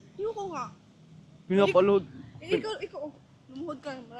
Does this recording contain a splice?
no; 0 cuts

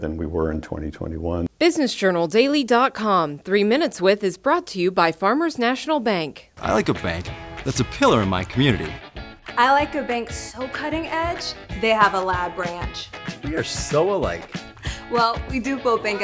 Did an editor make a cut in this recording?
yes; 1 cut; at 1.5 s

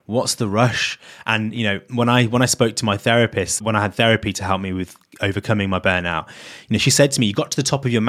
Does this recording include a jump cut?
no; 0 cuts

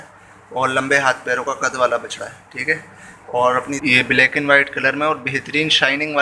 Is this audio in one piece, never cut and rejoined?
no; 1 cut; at 3.6 s

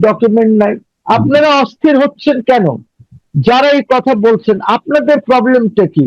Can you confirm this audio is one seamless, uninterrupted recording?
yes; 0 cuts

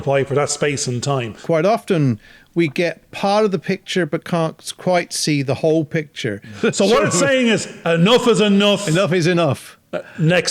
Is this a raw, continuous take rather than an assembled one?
no; 2 cuts; at 1.3 s, 6.5 s

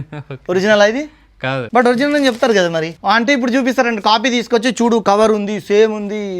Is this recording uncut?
no; 2 cuts; at 1.6 s, 2.9 s

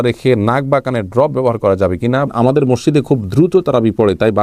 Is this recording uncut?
no; 1 cut; at 2.3 s

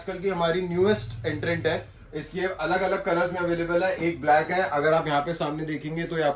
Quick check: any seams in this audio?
no; 0 cuts

